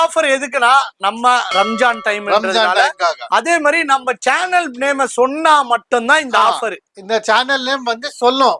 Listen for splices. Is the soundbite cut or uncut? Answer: uncut